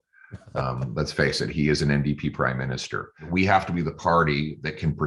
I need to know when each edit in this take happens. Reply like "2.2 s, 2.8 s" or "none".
3.3 s